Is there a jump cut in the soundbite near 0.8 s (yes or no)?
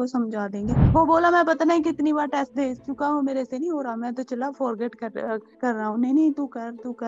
yes